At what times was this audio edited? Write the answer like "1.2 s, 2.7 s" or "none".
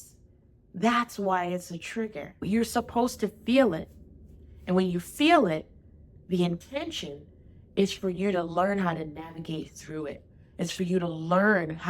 2.4 s